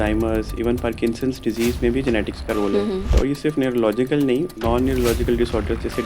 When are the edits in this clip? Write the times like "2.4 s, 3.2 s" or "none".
3.1 s, 4.5 s